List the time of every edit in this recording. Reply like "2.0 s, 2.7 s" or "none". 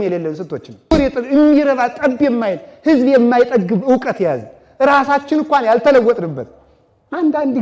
0.9 s